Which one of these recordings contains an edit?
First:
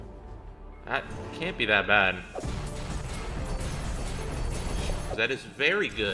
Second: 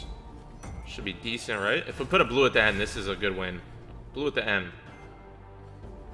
first; 2 cuts; at 2.3 s, 5.1 s

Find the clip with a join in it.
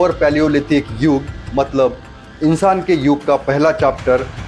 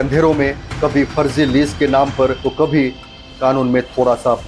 second; 1 cut; at 2.4 s

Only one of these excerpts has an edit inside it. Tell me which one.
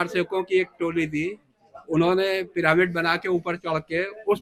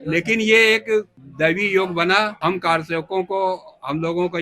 second; 2 cuts; at 1.2 s, 2.3 s

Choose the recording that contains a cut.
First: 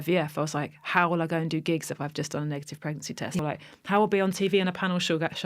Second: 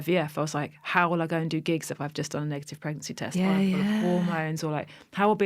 first; 1 cut; at 3.4 s

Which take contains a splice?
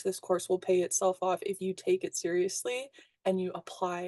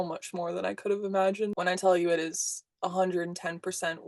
second; 1 cut; at 1.5 s

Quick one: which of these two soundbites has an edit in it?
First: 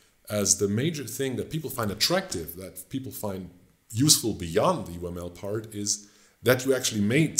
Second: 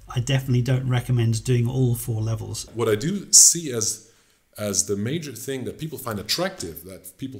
second; 1 cut; at 2.7 s

